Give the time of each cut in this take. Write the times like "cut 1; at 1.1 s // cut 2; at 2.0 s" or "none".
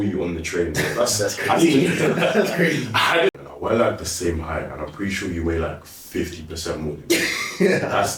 cut 1; at 3.3 s